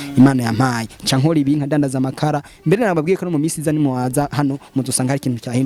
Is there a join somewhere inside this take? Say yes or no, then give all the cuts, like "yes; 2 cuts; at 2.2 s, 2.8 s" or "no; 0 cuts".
no; 0 cuts